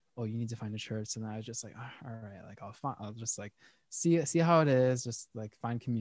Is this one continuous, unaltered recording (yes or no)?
yes